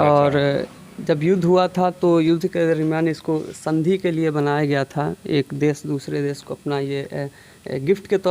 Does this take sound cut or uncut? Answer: uncut